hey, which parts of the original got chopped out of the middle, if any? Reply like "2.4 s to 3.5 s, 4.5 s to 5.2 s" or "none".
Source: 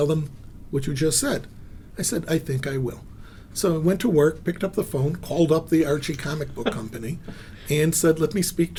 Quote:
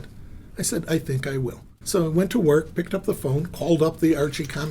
3.1 s to 3.4 s